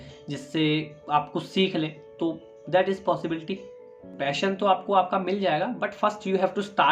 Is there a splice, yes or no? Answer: yes